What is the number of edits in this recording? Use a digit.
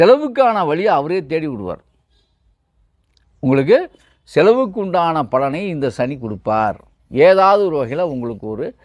0